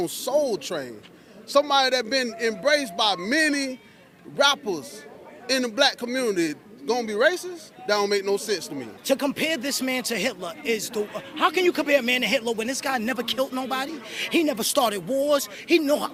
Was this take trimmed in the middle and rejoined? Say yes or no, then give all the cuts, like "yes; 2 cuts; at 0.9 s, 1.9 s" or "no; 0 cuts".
no; 0 cuts